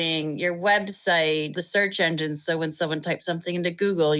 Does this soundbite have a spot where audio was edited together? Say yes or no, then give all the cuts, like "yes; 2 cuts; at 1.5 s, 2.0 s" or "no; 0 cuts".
yes; 1 cut; at 1.6 s